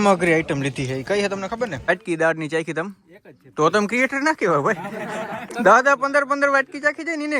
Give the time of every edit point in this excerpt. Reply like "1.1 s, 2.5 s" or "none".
1.9 s, 5.5 s